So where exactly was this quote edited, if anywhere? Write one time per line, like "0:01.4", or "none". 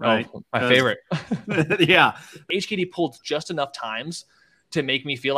0:02.3